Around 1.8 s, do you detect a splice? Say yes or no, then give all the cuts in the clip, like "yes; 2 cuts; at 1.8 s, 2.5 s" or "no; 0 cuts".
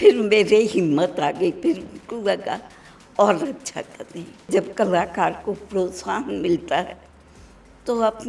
no; 1 cut; at 4.5 s